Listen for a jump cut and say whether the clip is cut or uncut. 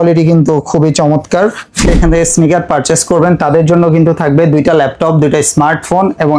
cut